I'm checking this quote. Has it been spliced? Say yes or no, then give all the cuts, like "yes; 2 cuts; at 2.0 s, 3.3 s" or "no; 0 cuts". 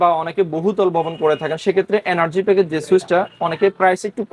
no; 0 cuts